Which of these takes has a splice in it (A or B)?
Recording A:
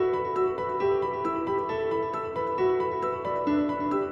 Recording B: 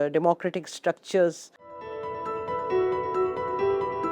B